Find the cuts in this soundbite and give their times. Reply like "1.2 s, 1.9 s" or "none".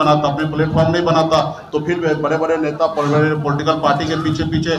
none